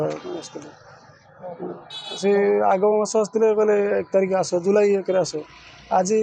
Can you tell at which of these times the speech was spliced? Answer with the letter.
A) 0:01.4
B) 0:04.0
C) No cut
C